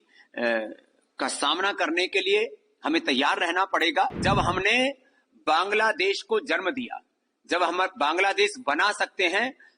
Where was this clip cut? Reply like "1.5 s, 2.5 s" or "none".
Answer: 4.2 s